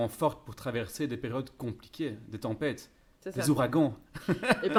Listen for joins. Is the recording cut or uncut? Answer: uncut